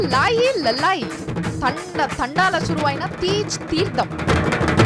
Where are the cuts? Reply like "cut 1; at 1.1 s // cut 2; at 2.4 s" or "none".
none